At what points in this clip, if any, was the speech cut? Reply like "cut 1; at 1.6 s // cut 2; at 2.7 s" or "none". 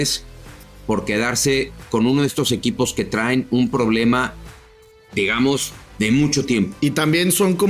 cut 1; at 6.7 s